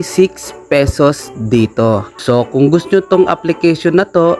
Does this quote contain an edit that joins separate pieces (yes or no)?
yes